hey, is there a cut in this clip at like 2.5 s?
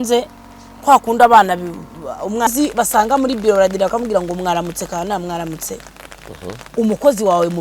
yes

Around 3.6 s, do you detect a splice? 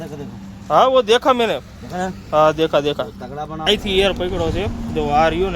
yes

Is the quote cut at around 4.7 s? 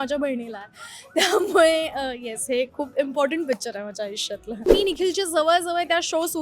yes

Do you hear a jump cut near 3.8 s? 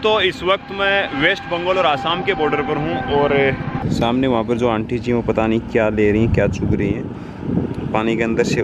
yes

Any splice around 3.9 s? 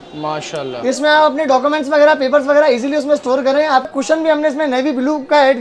yes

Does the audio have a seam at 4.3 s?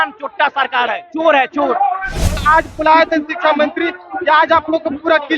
no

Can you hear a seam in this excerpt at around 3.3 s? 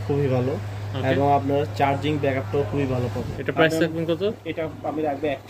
yes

